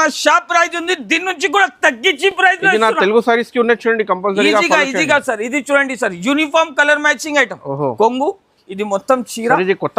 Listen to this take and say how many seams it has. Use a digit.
0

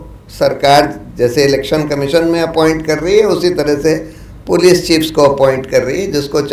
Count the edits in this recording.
0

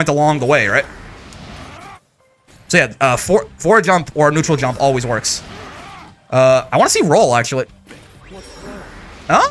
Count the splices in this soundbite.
0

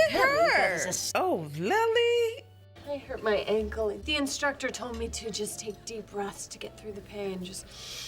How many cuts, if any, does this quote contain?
2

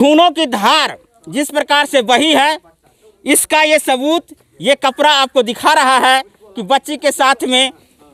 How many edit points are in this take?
0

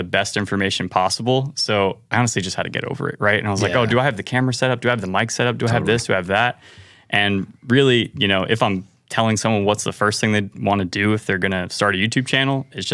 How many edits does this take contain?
0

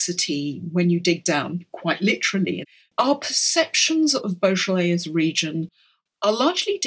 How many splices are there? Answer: 1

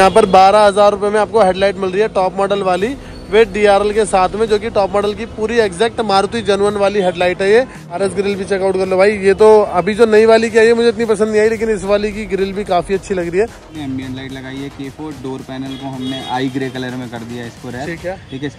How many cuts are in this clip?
2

